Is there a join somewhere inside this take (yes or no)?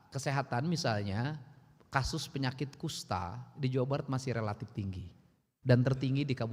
no